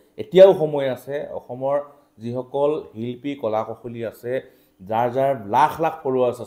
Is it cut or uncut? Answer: uncut